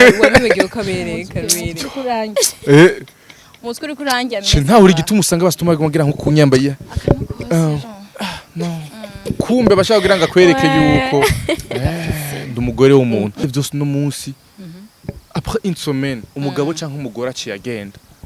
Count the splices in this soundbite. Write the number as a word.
one